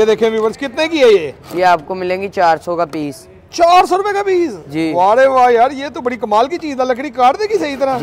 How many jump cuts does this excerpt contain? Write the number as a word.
zero